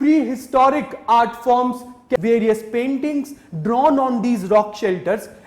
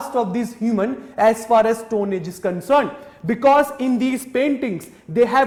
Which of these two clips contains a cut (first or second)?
first